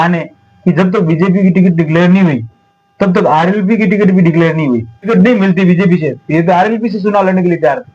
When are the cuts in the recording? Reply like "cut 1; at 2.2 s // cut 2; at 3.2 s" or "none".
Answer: cut 1; at 5.0 s